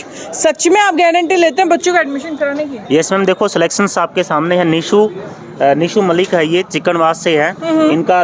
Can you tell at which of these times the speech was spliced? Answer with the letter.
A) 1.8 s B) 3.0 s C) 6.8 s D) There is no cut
D